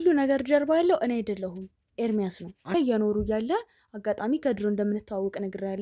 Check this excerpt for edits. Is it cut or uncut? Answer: cut